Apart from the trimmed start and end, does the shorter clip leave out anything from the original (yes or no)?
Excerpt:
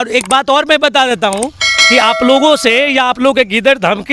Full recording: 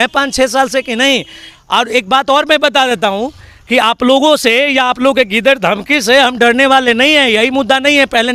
no